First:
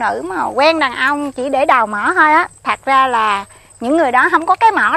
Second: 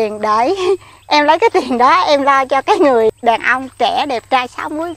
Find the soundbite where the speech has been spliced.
second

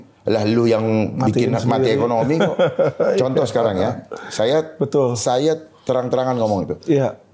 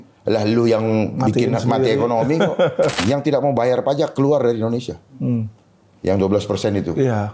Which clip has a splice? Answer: second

